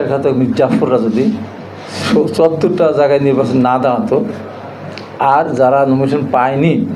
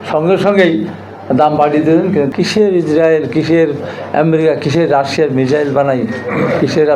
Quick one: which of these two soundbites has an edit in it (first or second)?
second